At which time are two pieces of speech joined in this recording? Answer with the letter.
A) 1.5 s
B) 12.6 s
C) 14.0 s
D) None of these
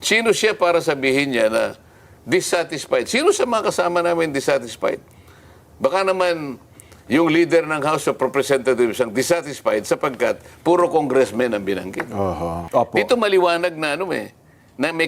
B